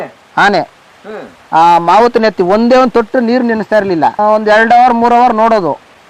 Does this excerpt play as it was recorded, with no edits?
yes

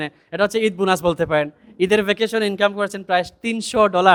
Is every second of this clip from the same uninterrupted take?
yes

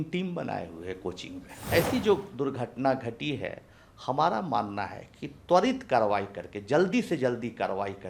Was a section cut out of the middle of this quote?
yes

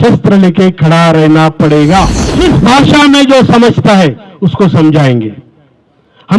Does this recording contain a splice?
yes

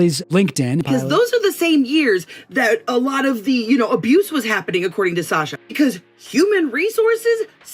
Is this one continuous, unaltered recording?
no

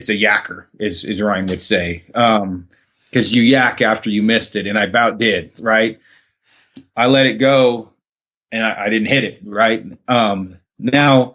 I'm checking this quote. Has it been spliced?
no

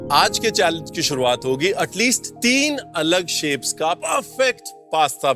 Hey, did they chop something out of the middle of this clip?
yes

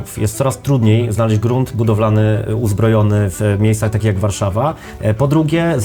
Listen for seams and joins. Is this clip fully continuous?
no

